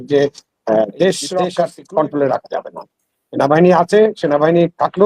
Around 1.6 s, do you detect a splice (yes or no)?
yes